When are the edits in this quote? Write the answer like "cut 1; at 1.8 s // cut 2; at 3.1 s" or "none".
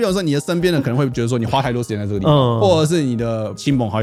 none